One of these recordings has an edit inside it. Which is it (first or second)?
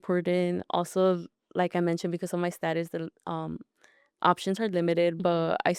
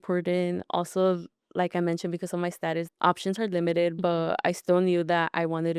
second